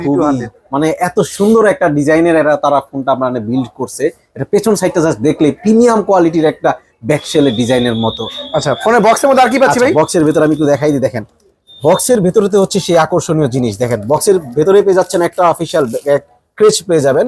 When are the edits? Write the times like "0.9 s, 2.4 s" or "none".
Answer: none